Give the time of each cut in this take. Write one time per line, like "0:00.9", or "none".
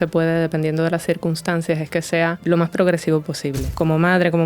0:02.4
0:03.7